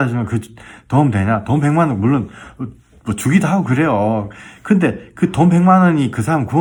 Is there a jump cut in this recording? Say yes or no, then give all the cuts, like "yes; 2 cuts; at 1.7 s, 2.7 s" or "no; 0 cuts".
no; 0 cuts